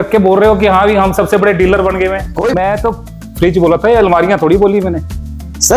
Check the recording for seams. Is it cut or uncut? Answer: cut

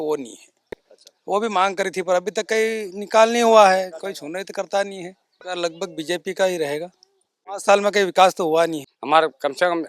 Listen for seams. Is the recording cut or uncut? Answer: cut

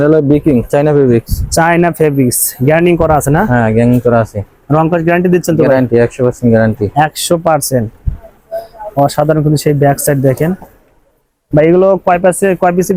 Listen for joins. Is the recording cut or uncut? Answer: uncut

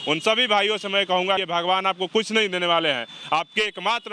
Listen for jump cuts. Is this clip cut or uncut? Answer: cut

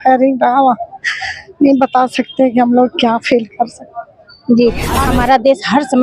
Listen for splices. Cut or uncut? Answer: cut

